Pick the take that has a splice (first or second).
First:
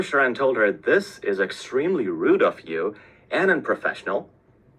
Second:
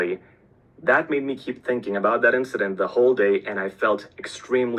first